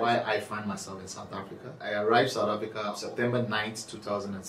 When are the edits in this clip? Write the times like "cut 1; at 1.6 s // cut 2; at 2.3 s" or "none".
cut 1; at 1.8 s // cut 2; at 3.0 s